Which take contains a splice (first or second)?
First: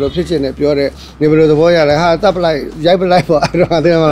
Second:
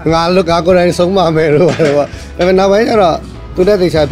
first